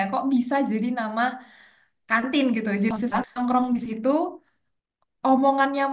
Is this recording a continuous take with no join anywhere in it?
no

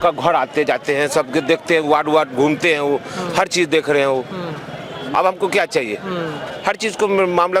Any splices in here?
no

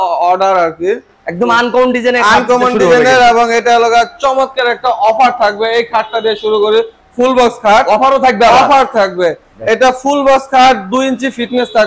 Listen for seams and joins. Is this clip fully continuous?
yes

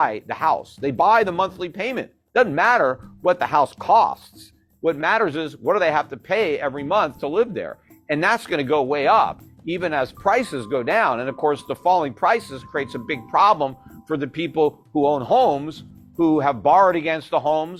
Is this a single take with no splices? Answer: yes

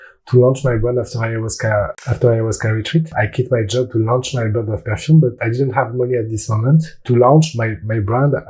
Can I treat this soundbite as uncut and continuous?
no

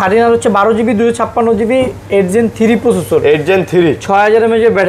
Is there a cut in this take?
no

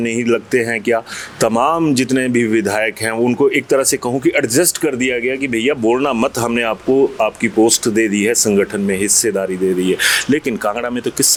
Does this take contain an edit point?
no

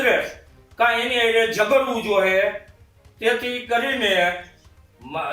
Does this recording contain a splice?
no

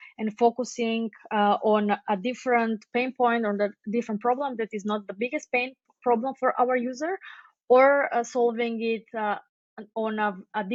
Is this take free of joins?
yes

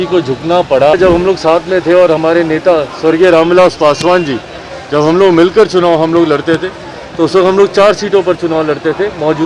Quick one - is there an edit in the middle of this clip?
yes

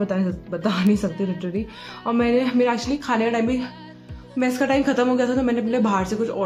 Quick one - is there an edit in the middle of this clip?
no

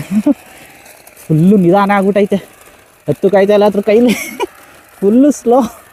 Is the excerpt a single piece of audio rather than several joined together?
yes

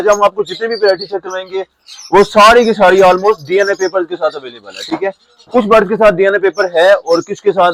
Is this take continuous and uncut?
yes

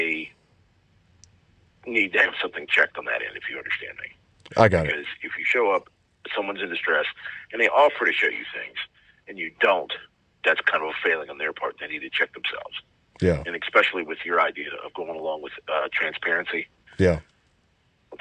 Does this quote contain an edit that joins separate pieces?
no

